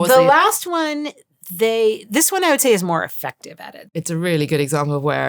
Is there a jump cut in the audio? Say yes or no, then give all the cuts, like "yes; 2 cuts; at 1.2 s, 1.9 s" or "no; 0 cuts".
yes; 1 cut; at 3.8 s